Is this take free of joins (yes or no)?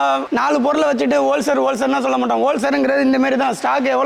yes